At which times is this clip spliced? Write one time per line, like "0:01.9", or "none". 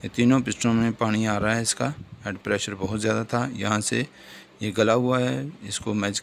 none